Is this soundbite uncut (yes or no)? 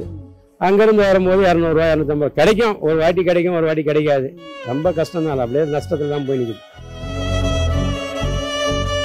no